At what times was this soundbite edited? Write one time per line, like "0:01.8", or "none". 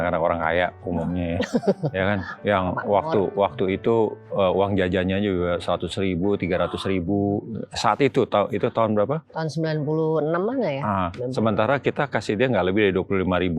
none